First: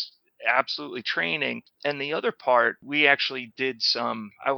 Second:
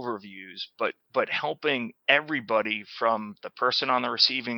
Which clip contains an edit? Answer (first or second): first